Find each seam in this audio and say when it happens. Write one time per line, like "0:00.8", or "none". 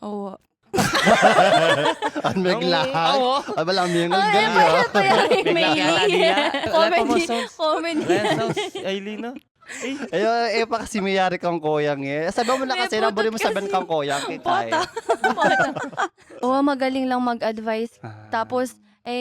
0:06.7
0:16.3